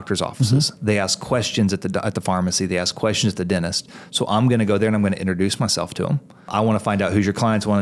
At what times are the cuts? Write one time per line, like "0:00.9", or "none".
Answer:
0:06.5

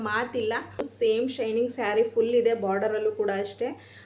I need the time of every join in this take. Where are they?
0:01.1

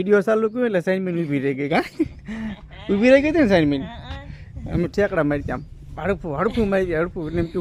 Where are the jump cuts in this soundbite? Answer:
none

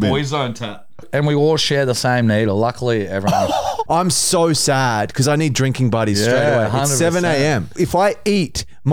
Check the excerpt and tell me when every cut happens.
0:01.1
0:03.8
0:07.7

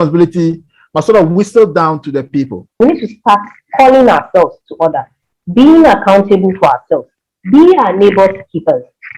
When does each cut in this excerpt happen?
0:02.7

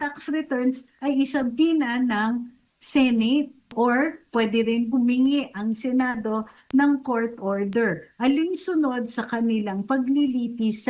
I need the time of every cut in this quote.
0:03.7

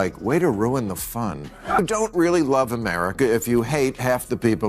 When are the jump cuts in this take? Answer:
0:01.4

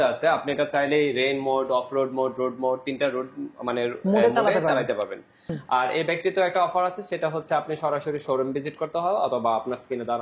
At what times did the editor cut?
0:05.6

